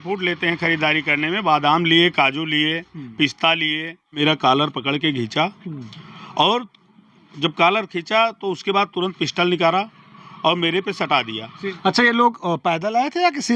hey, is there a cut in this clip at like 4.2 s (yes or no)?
yes